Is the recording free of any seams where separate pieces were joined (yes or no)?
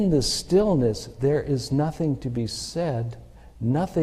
yes